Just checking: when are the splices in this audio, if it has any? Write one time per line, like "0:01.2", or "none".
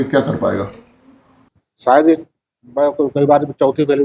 0:01.3